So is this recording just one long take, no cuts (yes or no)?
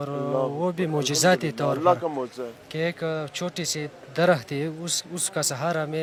yes